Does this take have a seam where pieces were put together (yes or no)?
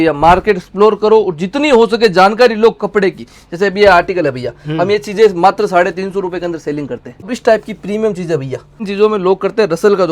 yes